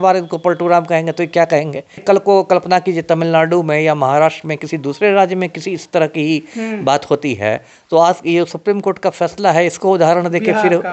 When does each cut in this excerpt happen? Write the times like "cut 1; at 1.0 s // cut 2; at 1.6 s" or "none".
cut 1; at 2.0 s